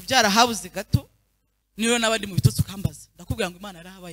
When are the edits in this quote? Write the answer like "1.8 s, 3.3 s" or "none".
none